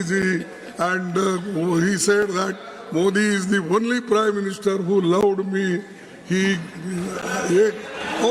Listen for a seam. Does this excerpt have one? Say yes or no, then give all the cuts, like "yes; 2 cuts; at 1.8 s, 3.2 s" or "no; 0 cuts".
no; 0 cuts